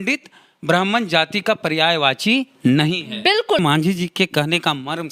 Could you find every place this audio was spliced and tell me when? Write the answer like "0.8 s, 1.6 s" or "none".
3.6 s